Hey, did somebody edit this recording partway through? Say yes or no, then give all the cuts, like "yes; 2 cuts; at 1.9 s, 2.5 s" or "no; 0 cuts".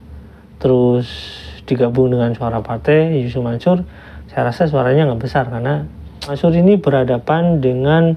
yes; 1 cut; at 6.4 s